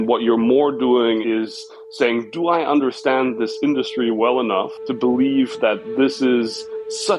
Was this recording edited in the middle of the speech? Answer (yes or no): no